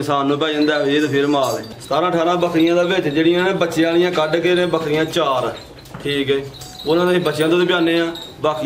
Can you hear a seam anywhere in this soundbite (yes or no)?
yes